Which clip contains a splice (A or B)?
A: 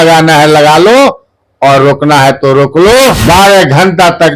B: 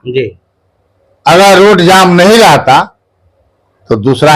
A